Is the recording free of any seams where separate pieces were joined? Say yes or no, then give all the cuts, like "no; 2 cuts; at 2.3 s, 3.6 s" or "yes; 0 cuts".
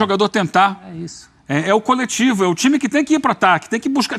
yes; 0 cuts